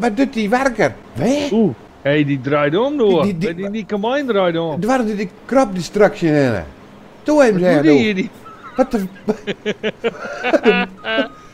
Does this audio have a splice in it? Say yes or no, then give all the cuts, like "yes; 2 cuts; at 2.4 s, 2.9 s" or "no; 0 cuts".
yes; 2 cuts; at 1.0 s, 1.9 s